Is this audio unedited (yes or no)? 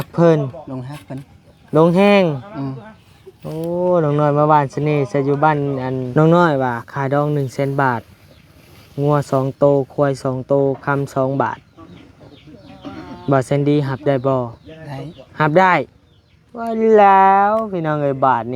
no